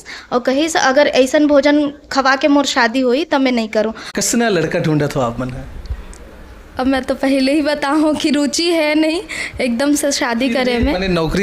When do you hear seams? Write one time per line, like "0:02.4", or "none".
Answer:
0:04.1